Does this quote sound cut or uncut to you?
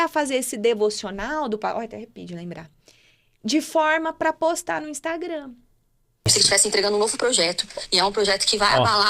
cut